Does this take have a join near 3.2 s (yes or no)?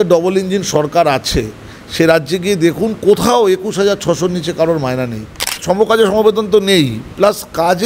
no